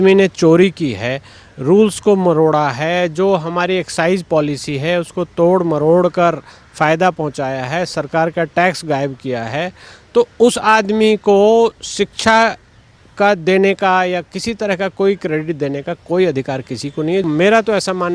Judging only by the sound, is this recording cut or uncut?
cut